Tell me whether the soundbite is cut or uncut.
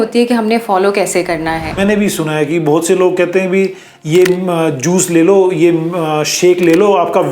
cut